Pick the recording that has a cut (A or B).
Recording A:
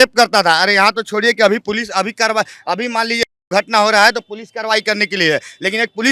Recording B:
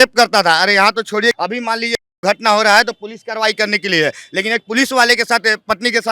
B